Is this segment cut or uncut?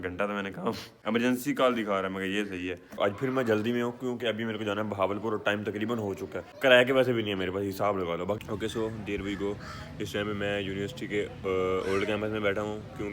cut